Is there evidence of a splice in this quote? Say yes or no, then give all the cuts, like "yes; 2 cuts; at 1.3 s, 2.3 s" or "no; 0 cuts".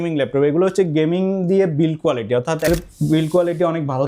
yes; 1 cut; at 2.7 s